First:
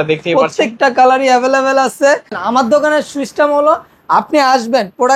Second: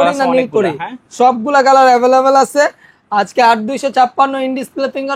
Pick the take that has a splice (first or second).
first